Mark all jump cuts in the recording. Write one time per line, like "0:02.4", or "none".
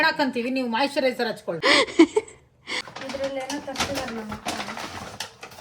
0:01.5
0:02.8